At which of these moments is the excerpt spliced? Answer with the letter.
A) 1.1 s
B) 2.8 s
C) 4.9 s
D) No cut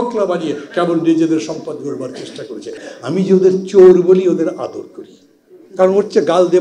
B